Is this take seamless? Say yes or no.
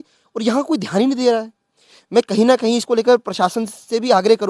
yes